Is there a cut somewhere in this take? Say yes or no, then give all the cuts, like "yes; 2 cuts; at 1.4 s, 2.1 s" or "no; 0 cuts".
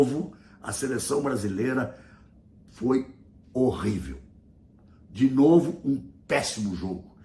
no; 0 cuts